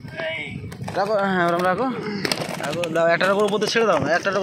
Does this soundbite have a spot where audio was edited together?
no; 0 cuts

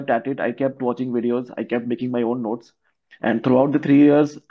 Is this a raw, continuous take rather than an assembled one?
yes; 0 cuts

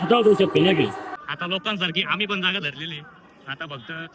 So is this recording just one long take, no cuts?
no; 1 cut; at 1.1 s

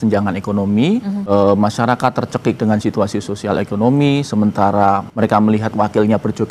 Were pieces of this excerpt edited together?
yes; 2 cuts; at 1.2 s, 5.1 s

